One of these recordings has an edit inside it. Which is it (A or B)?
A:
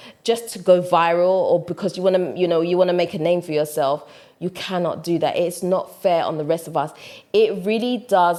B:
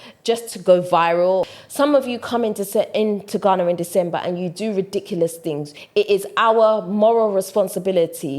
B